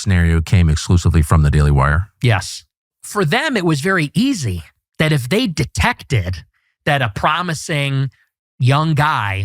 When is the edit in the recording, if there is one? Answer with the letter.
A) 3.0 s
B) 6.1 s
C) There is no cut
A